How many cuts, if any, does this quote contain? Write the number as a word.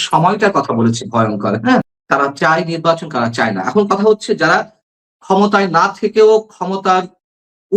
one